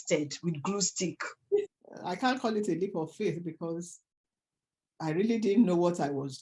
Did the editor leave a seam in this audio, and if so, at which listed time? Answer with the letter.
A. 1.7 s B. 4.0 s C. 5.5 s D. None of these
A